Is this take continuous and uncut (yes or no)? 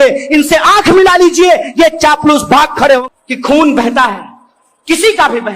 no